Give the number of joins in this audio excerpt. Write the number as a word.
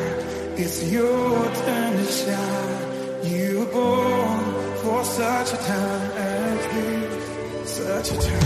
zero